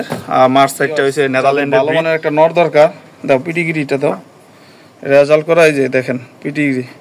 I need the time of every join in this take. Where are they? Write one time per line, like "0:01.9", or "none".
0:01.7